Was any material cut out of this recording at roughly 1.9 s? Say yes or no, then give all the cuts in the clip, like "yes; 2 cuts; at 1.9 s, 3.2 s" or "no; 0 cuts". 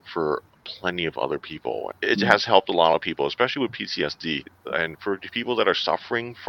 yes; 2 cuts; at 1.9 s, 4.5 s